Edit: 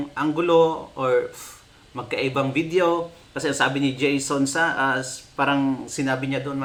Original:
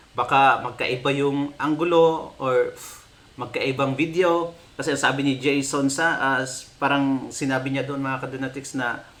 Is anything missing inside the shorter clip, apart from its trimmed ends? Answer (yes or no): no